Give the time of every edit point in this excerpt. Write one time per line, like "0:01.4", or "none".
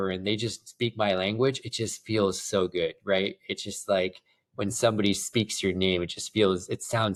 none